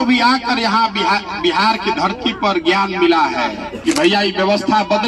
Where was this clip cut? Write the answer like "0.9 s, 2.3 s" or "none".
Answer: 3.7 s